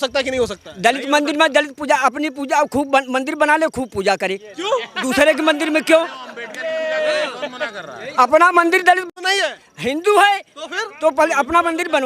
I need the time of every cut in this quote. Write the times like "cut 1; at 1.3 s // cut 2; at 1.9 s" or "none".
none